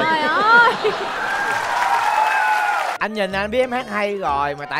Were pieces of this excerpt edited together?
no; 0 cuts

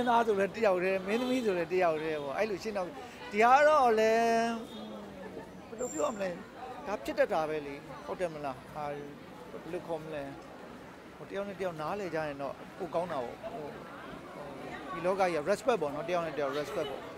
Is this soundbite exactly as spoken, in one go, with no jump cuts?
yes; 0 cuts

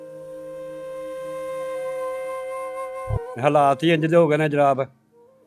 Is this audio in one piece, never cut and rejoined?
no; 1 cut; at 3.1 s

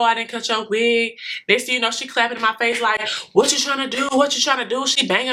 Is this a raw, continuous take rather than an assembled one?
yes; 0 cuts

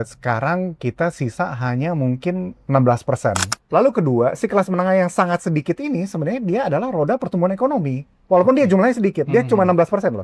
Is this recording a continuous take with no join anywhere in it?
no; 1 cut; at 3.5 s

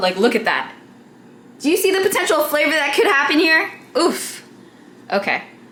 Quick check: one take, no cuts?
yes; 0 cuts

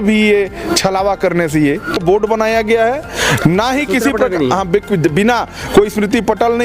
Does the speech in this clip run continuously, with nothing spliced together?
no; 1 cut; at 2.0 s

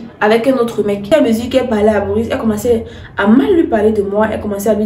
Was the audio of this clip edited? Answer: yes; 1 cut; at 1.1 s

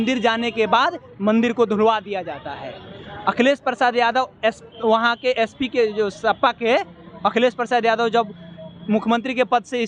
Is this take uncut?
yes; 0 cuts

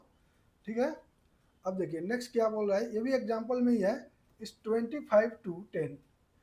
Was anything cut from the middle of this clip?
no; 0 cuts

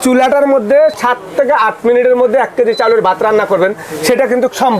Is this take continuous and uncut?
yes; 0 cuts

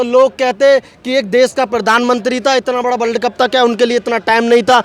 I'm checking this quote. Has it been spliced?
no; 0 cuts

